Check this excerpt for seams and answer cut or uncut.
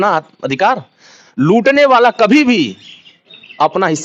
uncut